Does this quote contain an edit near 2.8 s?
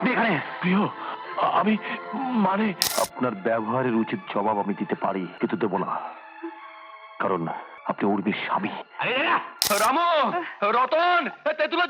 yes; 4 cuts; at 2.8 s, 5.3 s, 7.7 s, 9.7 s

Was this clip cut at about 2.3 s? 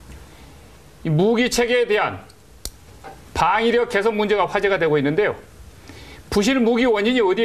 no; 0 cuts

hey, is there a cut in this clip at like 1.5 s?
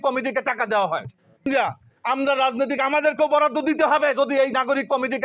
yes; 1 cut; at 1.5 s

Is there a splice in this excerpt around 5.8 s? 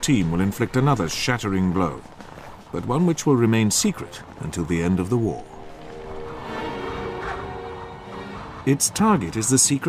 no; 1 cut; at 7.3 s

